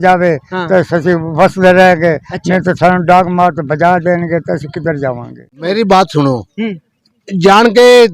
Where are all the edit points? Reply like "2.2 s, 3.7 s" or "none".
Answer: 5.7 s